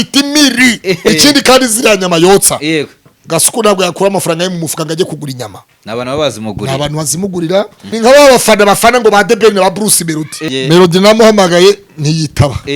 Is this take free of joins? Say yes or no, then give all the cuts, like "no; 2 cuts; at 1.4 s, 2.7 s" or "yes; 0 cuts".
no; 3 cuts; at 1.1 s, 7.8 s, 10.4 s